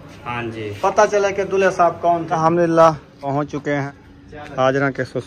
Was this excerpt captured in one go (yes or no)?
no